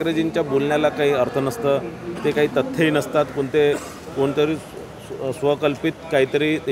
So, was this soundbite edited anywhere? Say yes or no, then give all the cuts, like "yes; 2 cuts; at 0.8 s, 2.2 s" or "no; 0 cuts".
no; 0 cuts